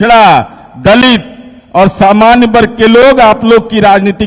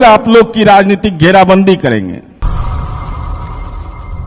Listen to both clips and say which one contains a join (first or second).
second